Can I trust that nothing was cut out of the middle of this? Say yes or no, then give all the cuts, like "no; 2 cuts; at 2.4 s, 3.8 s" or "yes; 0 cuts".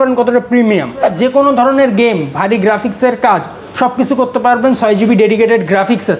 no; 1 cut; at 1.1 s